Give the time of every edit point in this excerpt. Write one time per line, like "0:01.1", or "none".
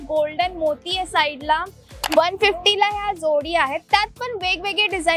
0:02.0